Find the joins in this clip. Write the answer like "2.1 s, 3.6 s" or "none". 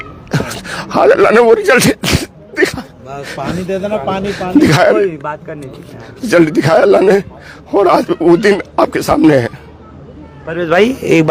none